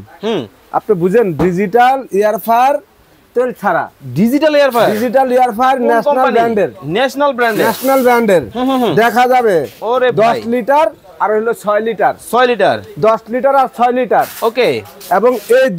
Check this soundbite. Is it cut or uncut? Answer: uncut